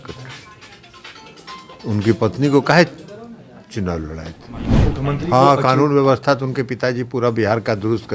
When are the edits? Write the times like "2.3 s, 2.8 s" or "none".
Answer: 4.6 s